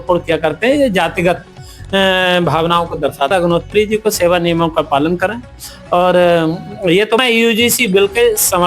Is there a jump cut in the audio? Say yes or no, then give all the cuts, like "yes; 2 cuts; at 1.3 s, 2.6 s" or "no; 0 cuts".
yes; 2 cuts; at 3.3 s, 7.2 s